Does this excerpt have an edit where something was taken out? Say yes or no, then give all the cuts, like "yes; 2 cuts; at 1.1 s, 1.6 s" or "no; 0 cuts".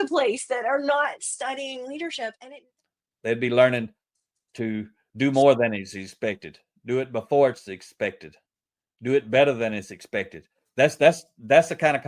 yes; 1 cut; at 2.4 s